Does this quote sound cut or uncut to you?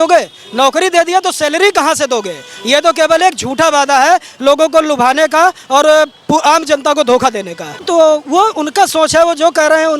cut